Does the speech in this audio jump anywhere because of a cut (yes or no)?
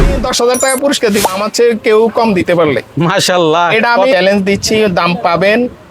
yes